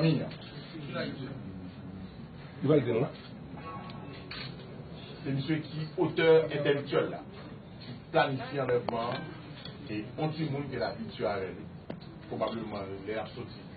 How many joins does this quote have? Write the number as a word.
one